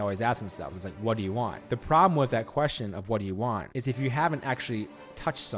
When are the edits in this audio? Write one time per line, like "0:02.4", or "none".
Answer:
0:01.6
0:03.7